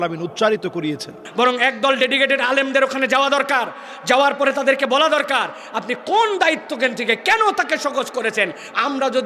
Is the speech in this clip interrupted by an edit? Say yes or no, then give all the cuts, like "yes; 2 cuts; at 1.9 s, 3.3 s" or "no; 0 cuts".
yes; 1 cut; at 1.2 s